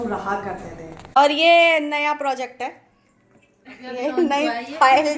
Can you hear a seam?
yes; 1 cut; at 1.2 s

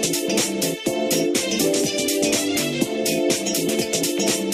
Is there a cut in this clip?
no; 0 cuts

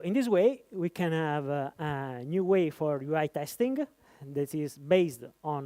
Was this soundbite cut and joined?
no; 0 cuts

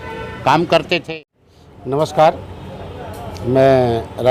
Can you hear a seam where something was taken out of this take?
yes; 1 cut; at 1.1 s

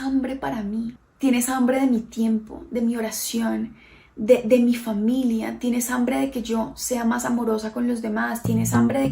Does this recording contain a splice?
yes; 1 cut; at 1.0 s

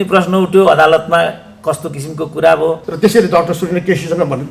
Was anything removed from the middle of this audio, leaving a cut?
yes; 1 cut; at 2.9 s

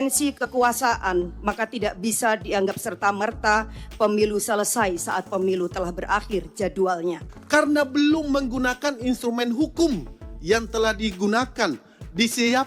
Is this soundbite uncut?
no; 1 cut; at 7.3 s

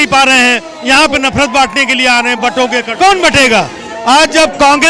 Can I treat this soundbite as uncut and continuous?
no; 1 cut; at 2.9 s

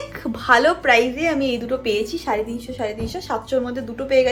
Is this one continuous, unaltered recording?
yes; 0 cuts

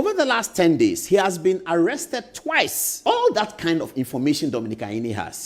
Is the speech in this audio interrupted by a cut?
yes; 1 cut; at 3.0 s

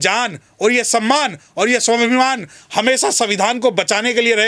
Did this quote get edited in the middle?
no; 0 cuts

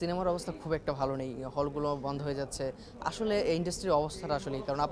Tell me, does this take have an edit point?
no; 0 cuts

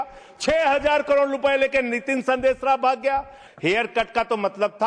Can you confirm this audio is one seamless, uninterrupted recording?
no; 1 cut; at 3.4 s

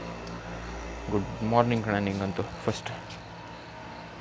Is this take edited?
no; 0 cuts

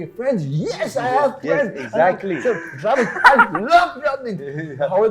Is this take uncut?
yes; 0 cuts

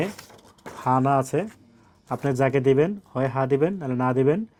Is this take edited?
no; 0 cuts

